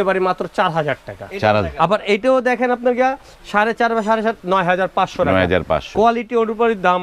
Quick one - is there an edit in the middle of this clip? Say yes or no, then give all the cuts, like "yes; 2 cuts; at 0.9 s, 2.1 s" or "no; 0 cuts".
no; 0 cuts